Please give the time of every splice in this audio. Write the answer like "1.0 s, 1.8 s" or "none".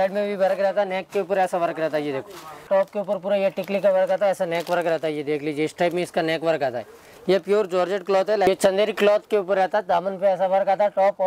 2.7 s, 8.5 s